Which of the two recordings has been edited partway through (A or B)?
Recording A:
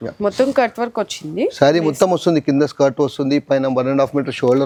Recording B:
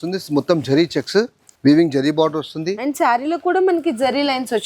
B